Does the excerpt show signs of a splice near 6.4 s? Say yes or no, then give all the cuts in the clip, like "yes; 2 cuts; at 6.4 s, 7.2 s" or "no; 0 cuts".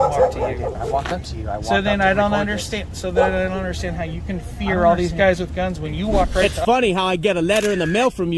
yes; 1 cut; at 6.4 s